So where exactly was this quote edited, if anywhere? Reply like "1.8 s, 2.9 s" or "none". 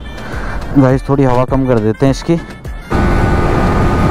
2.9 s